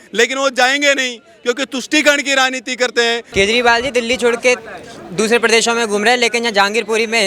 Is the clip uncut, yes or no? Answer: no